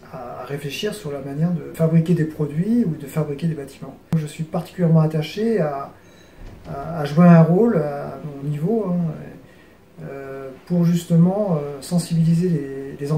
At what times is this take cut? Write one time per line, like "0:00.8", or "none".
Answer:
0:01.7
0:04.1